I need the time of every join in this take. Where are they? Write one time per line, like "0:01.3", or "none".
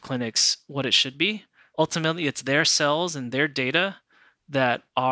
0:01.7